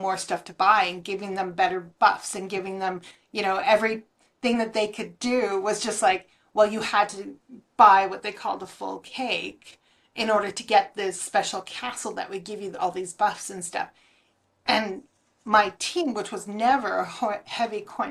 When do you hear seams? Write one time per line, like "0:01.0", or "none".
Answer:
none